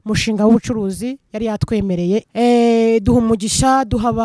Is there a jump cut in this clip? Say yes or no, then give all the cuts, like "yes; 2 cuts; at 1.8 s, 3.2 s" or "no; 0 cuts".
yes; 1 cut; at 2.3 s